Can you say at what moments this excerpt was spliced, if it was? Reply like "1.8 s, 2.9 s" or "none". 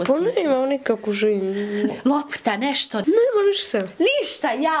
2.0 s, 3.0 s